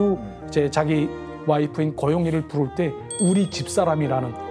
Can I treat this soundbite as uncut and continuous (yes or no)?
yes